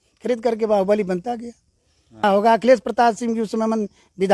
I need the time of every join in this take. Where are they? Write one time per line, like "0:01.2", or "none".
0:02.2